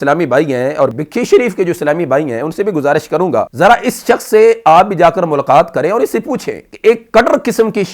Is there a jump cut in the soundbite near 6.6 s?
no; 2 cuts; at 0.9 s, 3.5 s

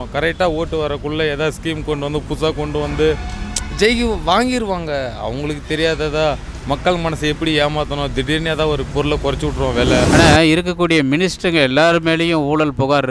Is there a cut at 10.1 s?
yes; 1 cut; at 10.1 s

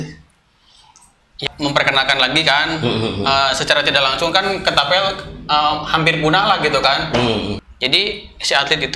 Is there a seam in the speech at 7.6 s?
yes; 2 cuts; at 1.4 s, 7.6 s

